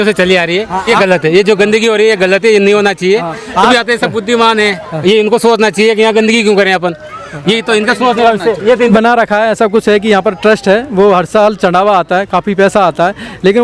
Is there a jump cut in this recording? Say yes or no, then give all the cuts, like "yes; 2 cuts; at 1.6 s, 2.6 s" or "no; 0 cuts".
yes; 3 cuts; at 0.9 s, 3.7 s, 8.9 s